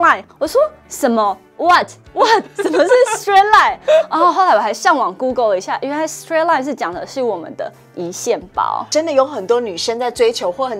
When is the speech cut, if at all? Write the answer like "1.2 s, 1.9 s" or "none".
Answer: 8.9 s